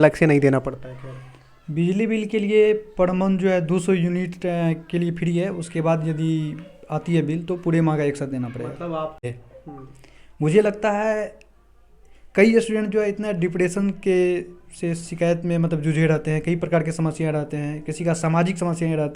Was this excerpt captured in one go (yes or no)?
no